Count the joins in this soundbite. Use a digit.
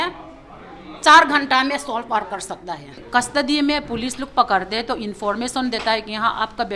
1